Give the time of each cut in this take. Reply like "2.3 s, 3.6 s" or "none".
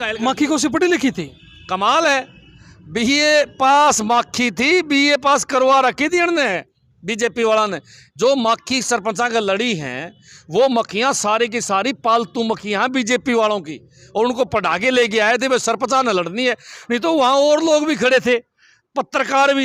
none